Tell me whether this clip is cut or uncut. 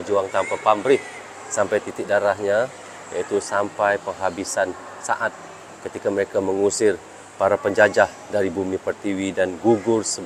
uncut